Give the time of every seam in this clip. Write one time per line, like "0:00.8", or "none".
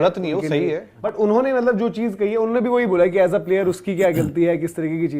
0:00.9